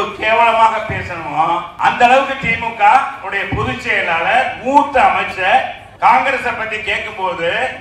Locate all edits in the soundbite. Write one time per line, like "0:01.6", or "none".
0:01.7
0:05.8